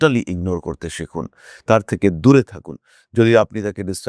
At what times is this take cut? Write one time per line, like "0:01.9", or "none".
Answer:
none